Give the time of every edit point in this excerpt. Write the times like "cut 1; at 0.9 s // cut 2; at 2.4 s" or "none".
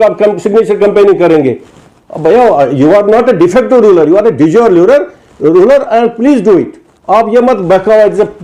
none